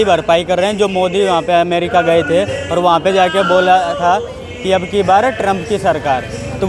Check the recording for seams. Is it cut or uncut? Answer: uncut